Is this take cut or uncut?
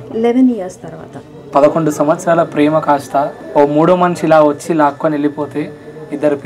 cut